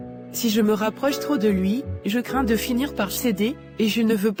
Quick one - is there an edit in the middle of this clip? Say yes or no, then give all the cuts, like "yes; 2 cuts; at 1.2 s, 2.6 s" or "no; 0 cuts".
no; 0 cuts